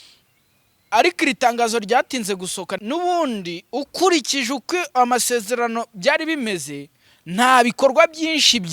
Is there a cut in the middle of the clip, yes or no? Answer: yes